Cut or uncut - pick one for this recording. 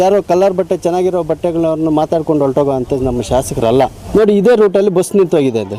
cut